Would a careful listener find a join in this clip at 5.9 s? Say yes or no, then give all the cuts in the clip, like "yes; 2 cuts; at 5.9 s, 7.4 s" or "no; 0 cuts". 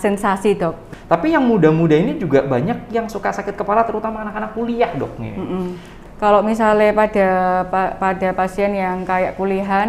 yes; 2 cuts; at 0.8 s, 5.9 s